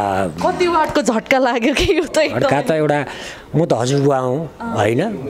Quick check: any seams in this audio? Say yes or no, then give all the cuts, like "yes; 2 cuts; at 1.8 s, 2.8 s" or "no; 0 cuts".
no; 0 cuts